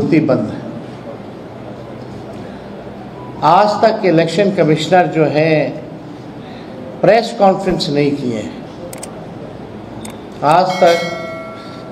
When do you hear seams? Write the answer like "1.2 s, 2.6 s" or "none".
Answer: none